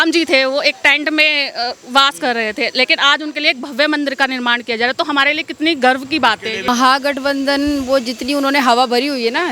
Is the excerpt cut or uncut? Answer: cut